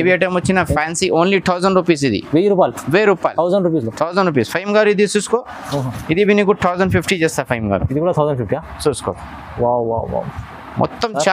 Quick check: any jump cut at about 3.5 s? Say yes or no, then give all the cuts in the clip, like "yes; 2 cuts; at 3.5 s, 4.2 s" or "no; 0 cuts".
no; 0 cuts